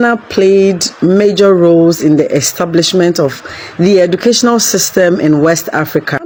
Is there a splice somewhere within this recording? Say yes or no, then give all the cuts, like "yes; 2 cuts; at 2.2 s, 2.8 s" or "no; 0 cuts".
no; 0 cuts